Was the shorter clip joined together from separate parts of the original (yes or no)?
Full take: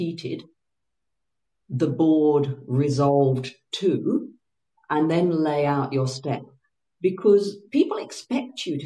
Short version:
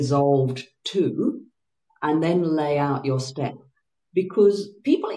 no